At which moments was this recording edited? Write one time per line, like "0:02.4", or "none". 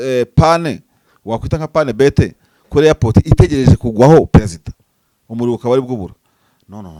none